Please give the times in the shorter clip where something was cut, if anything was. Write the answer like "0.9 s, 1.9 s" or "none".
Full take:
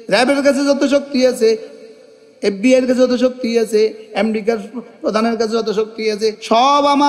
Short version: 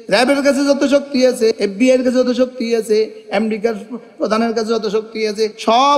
1.6 s